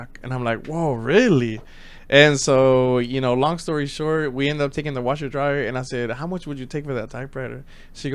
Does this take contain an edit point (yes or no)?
no